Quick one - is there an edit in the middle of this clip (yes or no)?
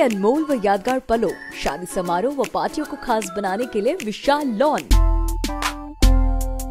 yes